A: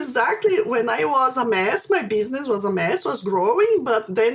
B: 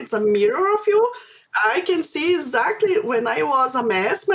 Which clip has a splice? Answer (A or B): B